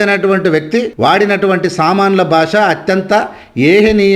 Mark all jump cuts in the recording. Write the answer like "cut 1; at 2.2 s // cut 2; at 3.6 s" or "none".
cut 1; at 0.9 s

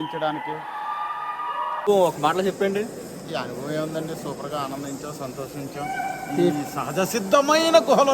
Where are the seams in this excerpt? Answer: cut 1; at 1.8 s

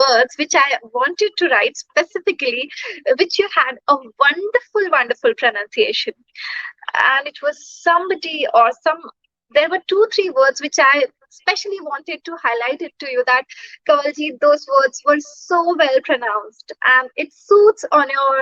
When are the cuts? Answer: none

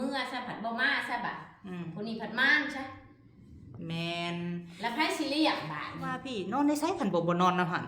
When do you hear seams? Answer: cut 1; at 6.6 s

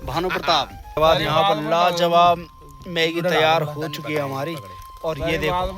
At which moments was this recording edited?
cut 1; at 1.0 s

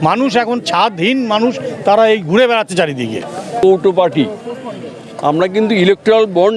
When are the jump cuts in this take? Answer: cut 1; at 3.6 s

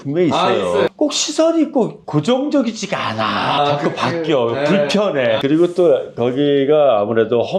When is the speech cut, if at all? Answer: cut 1; at 0.9 s // cut 2; at 3.6 s // cut 3; at 5.4 s

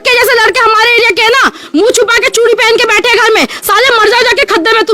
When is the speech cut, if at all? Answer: none

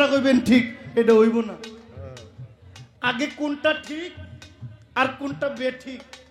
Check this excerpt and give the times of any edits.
none

